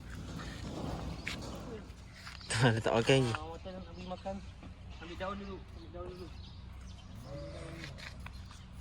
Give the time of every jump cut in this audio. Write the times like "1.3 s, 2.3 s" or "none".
1.7 s